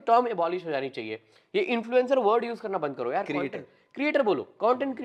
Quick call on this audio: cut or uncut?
uncut